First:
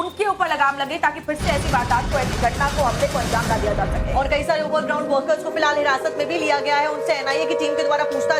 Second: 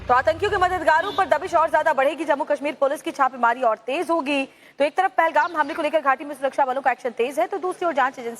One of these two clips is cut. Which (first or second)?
second